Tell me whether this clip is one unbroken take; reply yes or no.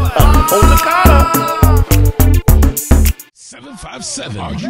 no